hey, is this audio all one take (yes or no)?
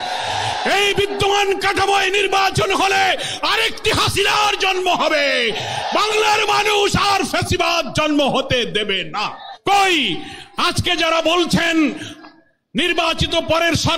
no